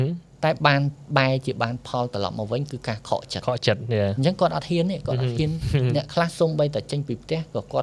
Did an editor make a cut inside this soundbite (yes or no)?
no